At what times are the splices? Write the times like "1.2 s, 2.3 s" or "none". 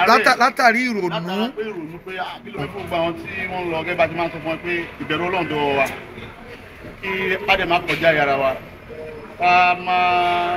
2.6 s